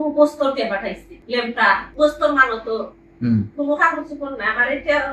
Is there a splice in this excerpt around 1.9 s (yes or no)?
yes